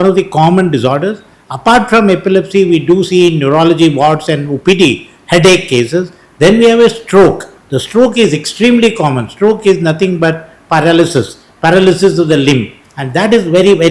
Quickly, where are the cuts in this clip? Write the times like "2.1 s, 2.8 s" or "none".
none